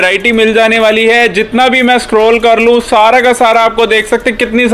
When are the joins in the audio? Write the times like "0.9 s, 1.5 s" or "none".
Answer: none